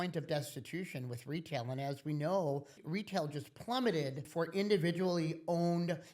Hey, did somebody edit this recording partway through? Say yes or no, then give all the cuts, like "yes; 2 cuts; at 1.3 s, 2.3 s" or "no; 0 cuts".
yes; 2 cuts; at 2.8 s, 4.2 s